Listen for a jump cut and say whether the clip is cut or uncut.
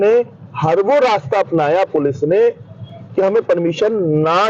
uncut